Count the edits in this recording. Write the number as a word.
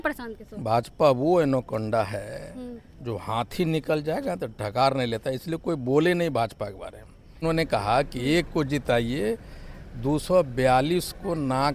one